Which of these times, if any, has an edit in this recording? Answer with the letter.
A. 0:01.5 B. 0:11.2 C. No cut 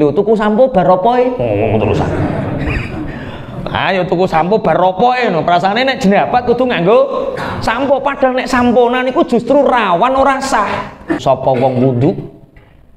B